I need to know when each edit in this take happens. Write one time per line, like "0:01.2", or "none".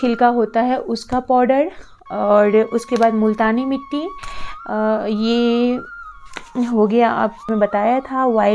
0:07.5